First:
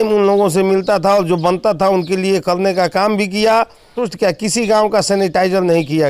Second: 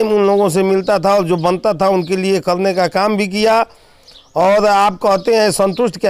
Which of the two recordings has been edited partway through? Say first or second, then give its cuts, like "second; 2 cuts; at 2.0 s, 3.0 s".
first; 1 cut; at 4.0 s